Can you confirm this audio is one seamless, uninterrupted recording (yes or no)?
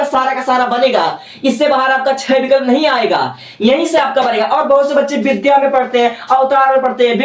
yes